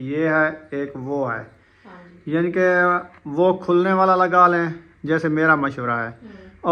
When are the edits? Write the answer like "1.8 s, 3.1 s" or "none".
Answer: none